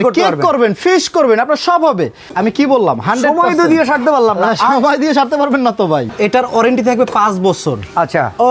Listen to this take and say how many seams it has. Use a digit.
2